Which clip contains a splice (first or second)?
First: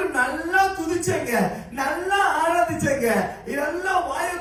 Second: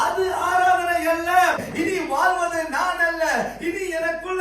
second